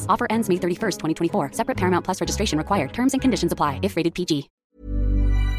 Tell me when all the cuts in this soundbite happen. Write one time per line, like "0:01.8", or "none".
0:04.5